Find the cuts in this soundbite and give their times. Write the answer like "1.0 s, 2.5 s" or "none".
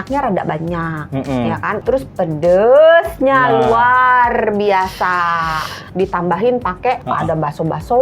1.8 s, 5.9 s, 7.0 s